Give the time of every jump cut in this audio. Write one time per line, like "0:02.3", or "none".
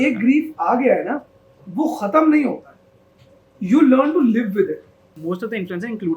0:05.1